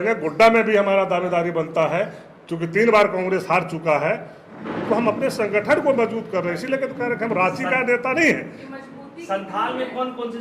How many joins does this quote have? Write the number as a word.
zero